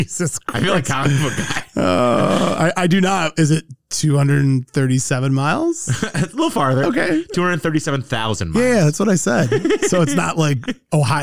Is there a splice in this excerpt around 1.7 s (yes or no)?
no